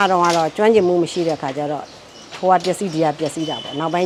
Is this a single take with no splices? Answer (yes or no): yes